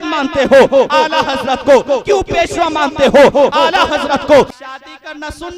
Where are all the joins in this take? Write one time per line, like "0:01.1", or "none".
0:04.5